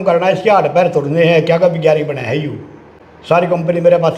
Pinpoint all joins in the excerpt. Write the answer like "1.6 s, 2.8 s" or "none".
none